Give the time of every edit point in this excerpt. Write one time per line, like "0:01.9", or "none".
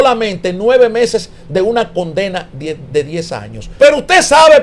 0:03.6